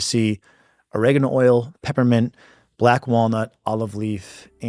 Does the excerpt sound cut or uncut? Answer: uncut